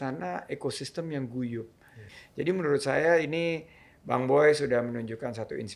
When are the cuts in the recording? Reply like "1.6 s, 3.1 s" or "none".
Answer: 2.1 s